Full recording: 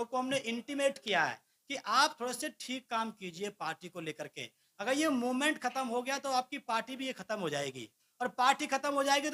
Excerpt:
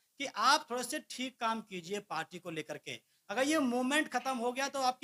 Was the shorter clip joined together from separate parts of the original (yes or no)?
no